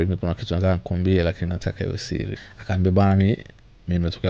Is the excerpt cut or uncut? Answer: cut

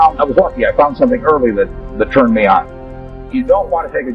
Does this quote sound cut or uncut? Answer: cut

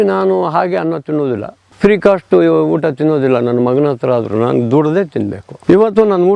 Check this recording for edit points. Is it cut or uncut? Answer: cut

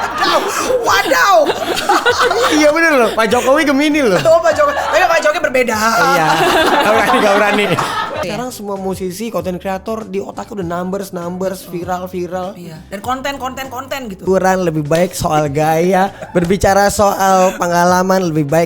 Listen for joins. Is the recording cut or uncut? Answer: cut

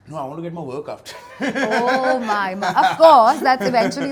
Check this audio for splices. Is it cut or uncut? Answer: uncut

